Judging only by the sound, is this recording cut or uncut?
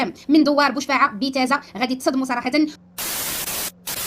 cut